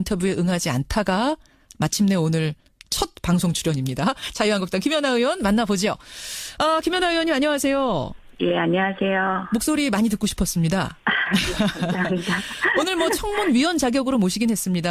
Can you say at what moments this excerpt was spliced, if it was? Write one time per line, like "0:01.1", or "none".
0:11.7